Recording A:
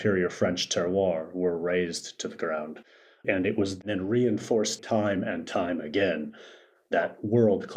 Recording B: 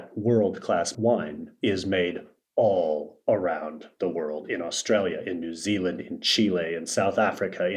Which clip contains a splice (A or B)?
A